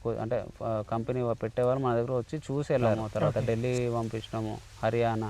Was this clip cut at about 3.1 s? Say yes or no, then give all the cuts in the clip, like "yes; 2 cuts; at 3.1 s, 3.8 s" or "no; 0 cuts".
yes; 1 cut; at 3.1 s